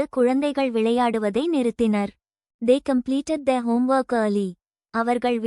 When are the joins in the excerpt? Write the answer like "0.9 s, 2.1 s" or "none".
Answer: 2.5 s